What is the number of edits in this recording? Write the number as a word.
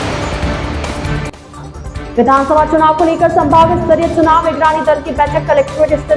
zero